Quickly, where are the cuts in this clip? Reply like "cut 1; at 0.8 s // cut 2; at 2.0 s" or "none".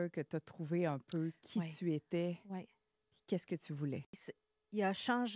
cut 1; at 4.1 s